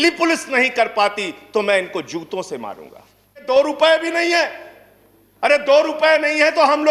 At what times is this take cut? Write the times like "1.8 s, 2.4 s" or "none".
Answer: 3.4 s